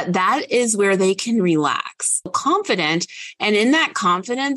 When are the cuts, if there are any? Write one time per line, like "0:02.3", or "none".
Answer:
0:02.3

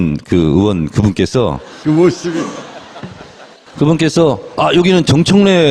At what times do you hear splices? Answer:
none

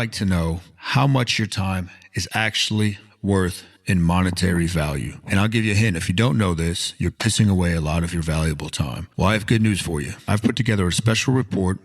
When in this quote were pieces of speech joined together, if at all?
0:03.7

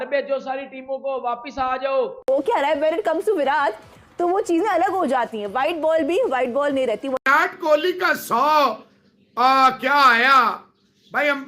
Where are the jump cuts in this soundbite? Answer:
0:02.3
0:07.2

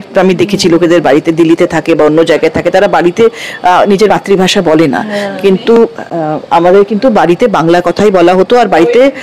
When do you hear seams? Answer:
none

